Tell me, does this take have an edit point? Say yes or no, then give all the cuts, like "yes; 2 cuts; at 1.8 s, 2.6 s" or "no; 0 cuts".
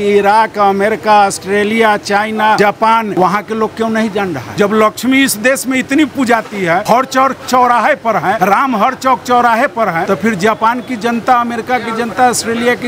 yes; 5 cuts; at 2.8 s, 4.4 s, 6.8 s, 8.4 s, 10.0 s